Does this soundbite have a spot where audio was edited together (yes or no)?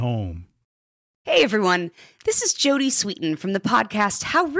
yes